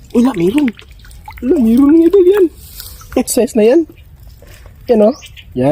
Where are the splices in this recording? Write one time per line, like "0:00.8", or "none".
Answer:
0:03.3